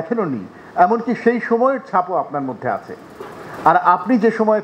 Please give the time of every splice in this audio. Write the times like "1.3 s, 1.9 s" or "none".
none